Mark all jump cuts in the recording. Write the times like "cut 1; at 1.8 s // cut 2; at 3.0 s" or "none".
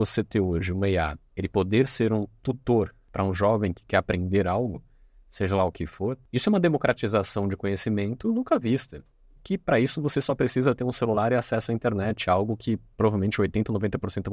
cut 1; at 1.2 s // cut 2; at 3.0 s // cut 3; at 6.2 s

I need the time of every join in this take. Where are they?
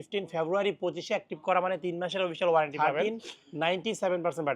cut 1; at 2.8 s

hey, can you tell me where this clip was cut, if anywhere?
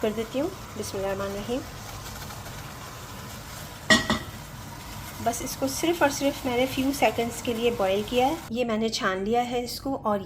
cut 1; at 8.4 s

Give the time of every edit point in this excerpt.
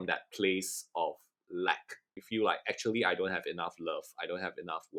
none

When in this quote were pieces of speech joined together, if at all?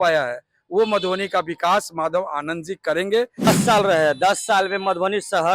cut 1; at 3.5 s

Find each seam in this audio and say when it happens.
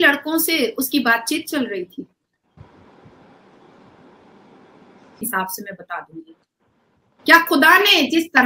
cut 1; at 5.2 s

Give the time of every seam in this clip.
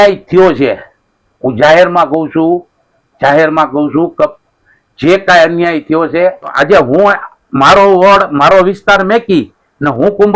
cut 1; at 6.4 s

